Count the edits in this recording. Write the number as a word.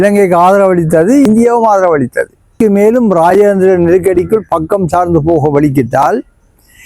two